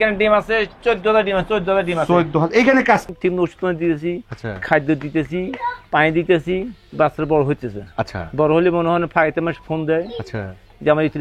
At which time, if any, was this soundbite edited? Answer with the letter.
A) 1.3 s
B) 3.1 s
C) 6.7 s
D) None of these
B